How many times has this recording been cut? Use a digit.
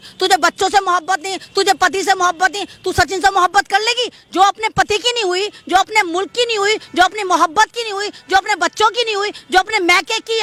0